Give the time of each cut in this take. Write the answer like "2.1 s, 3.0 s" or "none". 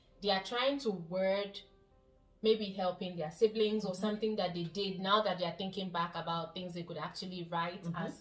none